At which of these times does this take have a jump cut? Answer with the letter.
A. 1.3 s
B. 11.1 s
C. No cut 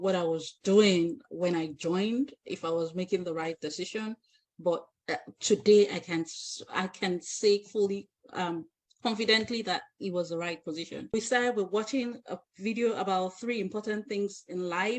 B